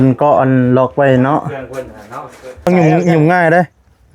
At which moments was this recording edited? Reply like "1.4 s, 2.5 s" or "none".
2.7 s